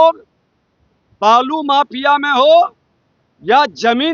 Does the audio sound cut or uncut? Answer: uncut